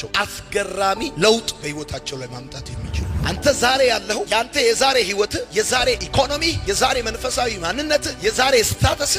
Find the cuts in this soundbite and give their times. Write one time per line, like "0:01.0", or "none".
0:03.1